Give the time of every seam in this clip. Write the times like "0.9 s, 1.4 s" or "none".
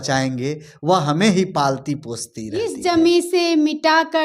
2.7 s